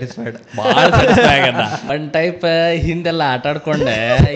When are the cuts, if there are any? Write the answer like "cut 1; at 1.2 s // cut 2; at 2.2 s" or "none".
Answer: cut 1; at 1.8 s